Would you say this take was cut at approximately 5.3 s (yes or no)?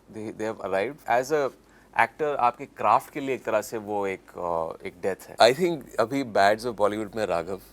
yes